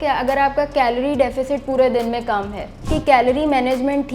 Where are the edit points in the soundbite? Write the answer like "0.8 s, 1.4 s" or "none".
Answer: 2.9 s